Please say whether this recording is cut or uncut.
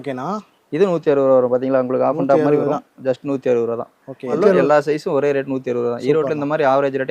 cut